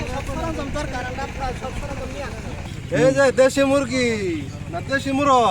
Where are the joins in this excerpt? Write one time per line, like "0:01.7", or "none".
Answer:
0:02.7